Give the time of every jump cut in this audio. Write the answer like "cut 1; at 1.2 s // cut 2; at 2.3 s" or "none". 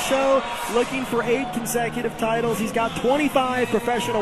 none